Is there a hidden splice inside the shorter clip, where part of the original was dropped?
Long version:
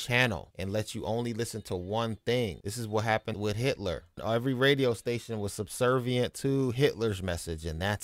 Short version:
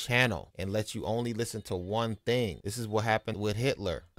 no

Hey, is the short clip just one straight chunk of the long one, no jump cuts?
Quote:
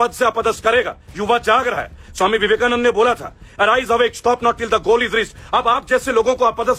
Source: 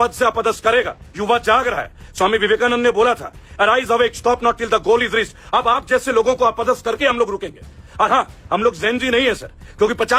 yes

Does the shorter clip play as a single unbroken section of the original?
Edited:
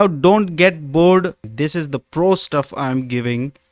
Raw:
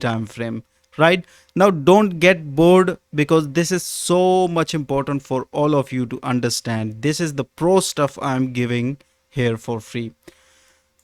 no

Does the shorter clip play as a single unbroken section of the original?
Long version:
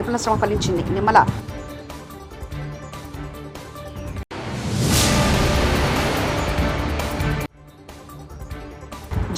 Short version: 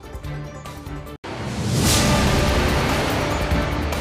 no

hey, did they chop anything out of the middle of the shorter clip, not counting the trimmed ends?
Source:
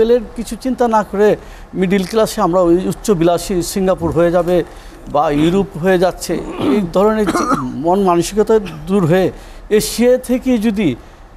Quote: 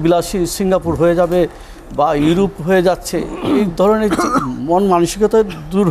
no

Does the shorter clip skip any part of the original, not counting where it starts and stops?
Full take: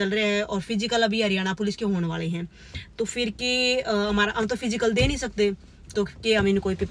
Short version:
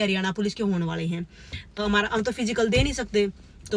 yes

